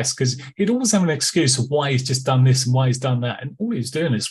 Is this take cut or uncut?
uncut